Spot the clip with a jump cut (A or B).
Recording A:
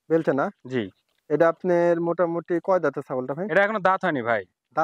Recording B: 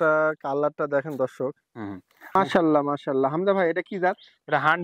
B